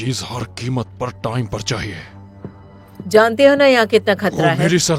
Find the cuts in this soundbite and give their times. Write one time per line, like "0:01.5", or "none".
none